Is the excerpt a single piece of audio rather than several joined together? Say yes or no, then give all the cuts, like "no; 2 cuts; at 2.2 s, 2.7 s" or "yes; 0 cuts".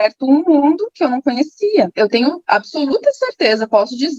no; 1 cut; at 2.2 s